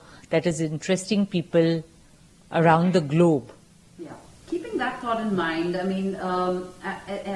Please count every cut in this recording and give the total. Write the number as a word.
zero